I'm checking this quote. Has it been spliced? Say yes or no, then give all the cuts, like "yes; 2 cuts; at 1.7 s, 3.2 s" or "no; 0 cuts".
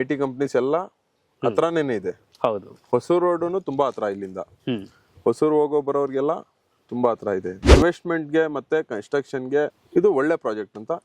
yes; 2 cuts; at 7.7 s, 9.8 s